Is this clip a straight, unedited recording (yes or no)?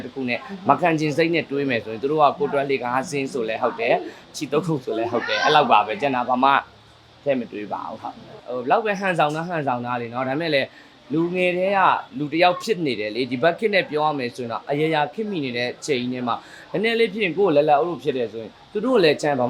no